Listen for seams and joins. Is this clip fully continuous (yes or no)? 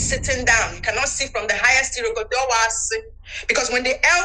yes